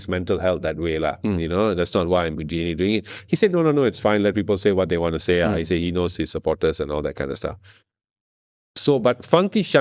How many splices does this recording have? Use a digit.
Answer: 0